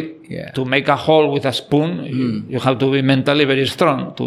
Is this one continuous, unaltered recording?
yes; 0 cuts

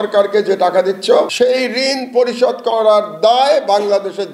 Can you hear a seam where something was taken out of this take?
yes; 1 cut; at 1.3 s

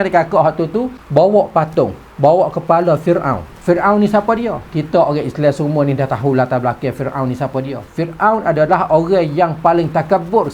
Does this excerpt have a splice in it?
yes; 1 cut; at 1.0 s

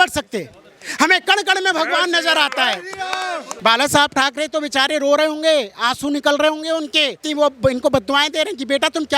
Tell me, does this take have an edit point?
yes; 2 cuts; at 3.5 s, 7.2 s

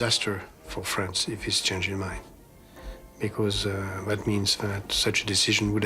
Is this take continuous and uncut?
no; 1 cut; at 4.9 s

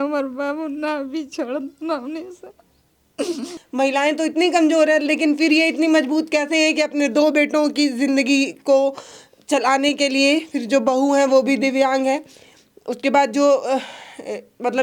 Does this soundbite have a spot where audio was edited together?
yes; 1 cut; at 3.5 s

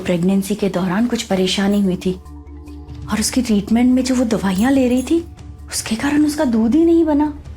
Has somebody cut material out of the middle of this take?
yes; 1 cut; at 1.2 s

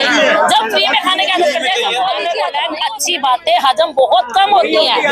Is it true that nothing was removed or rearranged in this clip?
no; 1 cut; at 2.4 s

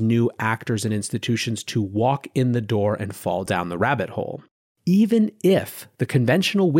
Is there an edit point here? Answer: yes; 1 cut; at 4.6 s

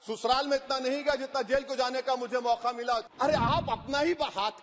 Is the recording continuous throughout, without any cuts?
no; 1 cut; at 3.0 s

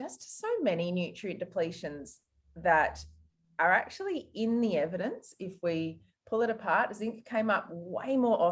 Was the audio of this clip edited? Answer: no; 0 cuts

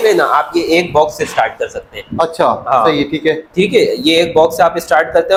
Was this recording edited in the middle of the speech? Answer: no; 0 cuts

